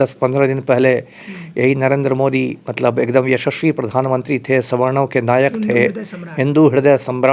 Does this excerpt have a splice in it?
no; 0 cuts

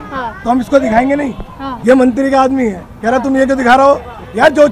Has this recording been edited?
no; 0 cuts

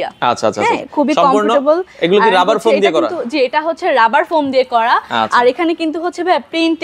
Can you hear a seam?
no; 0 cuts

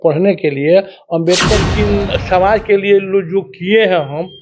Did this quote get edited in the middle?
yes; 1 cut; at 1.7 s

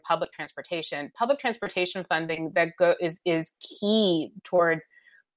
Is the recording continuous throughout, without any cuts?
yes; 0 cuts

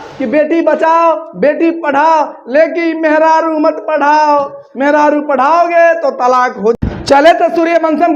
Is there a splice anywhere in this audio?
yes; 1 cut; at 6.8 s

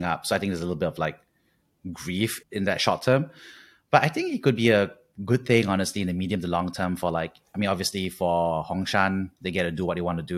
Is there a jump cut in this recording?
yes; 1 cut; at 2.4 s

